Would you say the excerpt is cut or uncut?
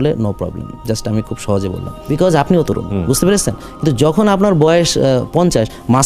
cut